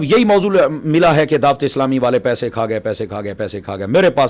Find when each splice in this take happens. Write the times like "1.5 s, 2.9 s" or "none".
none